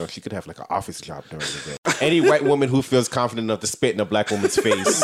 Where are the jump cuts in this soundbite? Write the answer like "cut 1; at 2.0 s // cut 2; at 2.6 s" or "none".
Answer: cut 1; at 1.8 s